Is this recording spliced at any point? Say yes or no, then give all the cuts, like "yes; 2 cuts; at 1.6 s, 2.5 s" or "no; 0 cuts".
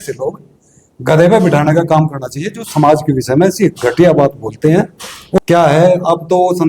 yes; 1 cut; at 5.4 s